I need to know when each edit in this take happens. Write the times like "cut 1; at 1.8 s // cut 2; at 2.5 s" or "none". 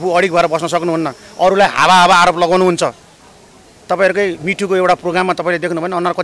none